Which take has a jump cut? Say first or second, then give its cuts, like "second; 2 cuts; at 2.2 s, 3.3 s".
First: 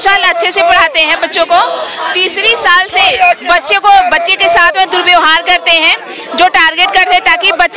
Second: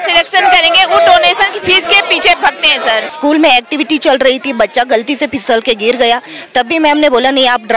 second; 1 cut; at 3.1 s